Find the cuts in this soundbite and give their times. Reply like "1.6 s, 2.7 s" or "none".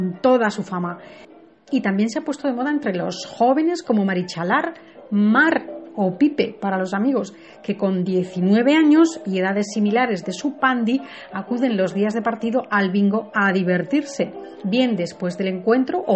2.2 s